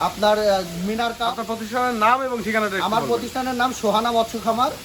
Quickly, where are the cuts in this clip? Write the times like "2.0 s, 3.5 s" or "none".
1.3 s